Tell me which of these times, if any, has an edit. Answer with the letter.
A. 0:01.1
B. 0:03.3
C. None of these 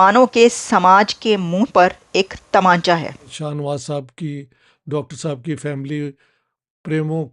B